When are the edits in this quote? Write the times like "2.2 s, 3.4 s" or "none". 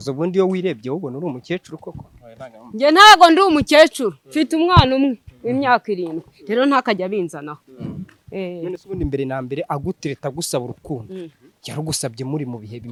none